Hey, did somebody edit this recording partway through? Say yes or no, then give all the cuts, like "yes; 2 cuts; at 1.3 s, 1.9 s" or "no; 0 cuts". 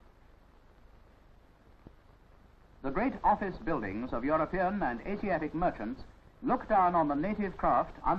yes; 1 cut; at 7.1 s